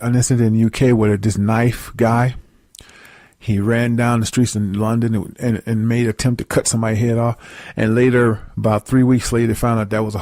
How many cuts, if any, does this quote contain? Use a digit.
0